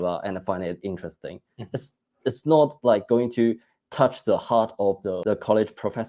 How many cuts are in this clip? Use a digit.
1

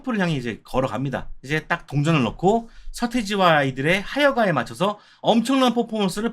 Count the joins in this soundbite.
1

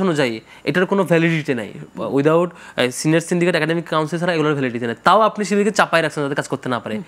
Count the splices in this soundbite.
0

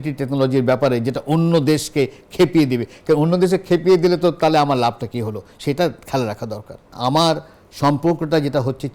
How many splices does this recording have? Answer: 1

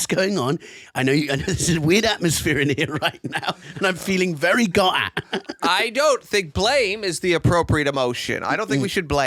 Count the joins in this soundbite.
0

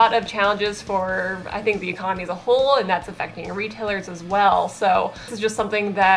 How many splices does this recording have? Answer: 1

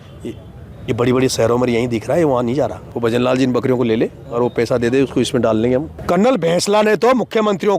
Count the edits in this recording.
2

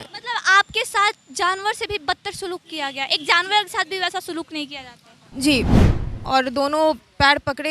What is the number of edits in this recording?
1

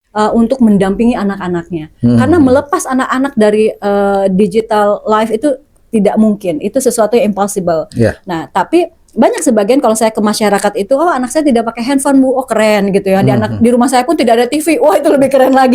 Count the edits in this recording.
0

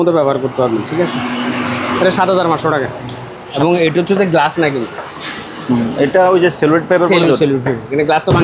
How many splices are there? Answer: 1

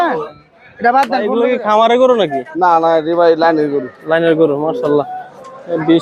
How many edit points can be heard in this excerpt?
1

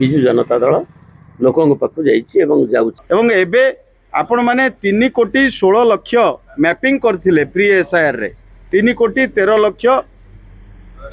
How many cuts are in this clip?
1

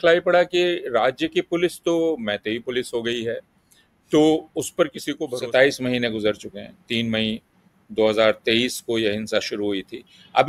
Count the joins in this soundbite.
1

